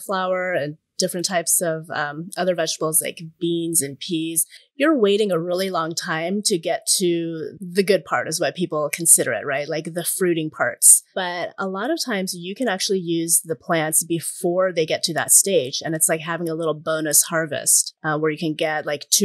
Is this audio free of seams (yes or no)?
yes